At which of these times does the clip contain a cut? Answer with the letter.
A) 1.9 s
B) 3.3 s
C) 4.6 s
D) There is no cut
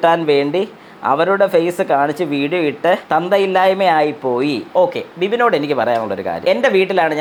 D